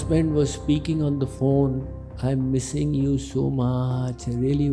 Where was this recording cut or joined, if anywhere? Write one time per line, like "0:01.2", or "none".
none

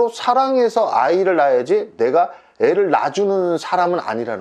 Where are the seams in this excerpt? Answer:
none

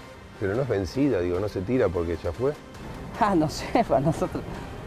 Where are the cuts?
none

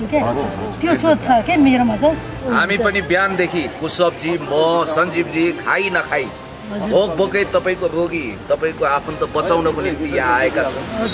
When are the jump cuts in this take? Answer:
0:02.3

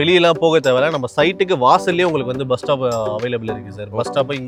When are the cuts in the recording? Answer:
none

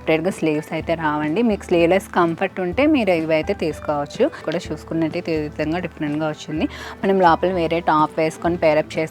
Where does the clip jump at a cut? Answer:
0:04.4

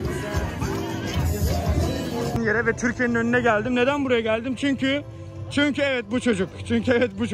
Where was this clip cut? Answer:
0:02.5

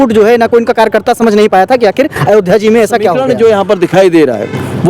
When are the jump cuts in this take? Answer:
0:03.2

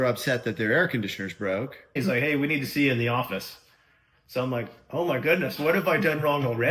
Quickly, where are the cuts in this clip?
0:02.0

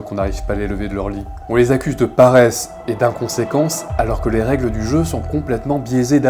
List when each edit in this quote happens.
0:01.3

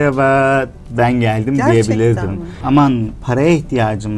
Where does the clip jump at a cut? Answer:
0:02.8

